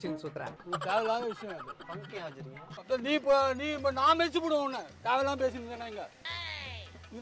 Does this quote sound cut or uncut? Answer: cut